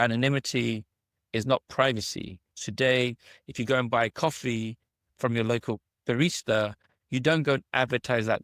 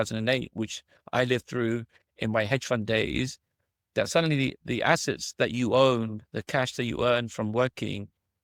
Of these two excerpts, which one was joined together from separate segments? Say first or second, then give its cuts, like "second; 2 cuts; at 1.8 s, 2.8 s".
first; 1 cut; at 2.5 s